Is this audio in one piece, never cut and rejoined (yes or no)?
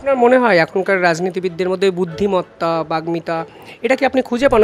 yes